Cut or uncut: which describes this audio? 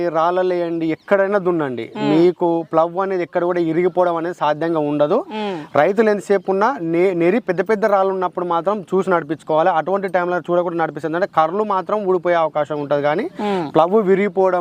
uncut